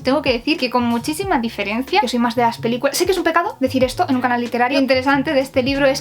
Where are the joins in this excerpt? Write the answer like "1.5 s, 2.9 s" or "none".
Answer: 2.0 s, 4.7 s